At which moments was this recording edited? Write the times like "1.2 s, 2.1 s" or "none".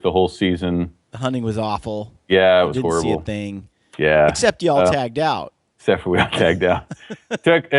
none